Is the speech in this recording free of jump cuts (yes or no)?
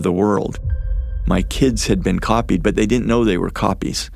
no